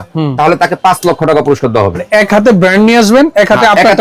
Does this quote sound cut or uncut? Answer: cut